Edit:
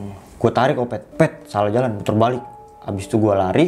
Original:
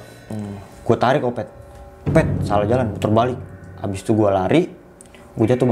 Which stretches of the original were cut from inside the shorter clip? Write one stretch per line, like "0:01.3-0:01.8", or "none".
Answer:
0:01.5-0:02.0